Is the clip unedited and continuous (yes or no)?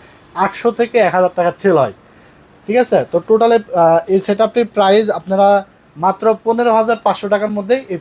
yes